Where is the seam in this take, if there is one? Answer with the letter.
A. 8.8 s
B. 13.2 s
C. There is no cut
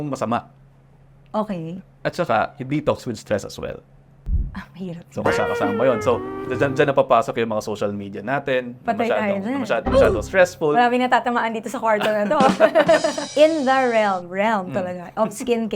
B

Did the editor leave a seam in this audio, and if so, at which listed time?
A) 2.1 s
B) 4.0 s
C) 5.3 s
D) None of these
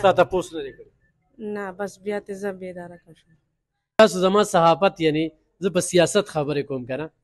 B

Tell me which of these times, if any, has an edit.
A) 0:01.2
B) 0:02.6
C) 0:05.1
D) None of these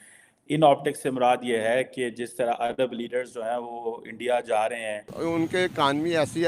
C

